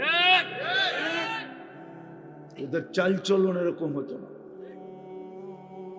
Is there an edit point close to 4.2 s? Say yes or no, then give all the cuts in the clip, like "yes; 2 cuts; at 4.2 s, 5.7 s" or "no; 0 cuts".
no; 0 cuts